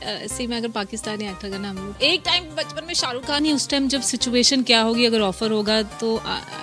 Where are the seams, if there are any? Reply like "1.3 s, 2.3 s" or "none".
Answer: 1.9 s, 3.4 s